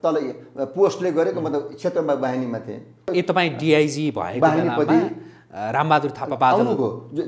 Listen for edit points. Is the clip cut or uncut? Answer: cut